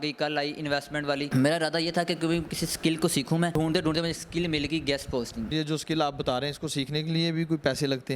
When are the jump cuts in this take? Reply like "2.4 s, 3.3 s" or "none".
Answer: 1.3 s, 3.5 s, 5.5 s